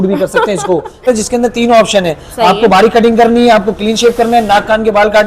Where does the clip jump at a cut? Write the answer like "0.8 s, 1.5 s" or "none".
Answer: 1.1 s